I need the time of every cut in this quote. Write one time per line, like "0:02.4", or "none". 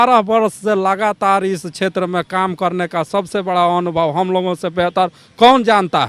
none